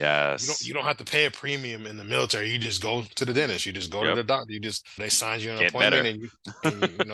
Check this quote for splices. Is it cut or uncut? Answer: uncut